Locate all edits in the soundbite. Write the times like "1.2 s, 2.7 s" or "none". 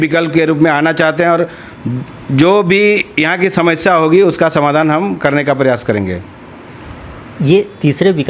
none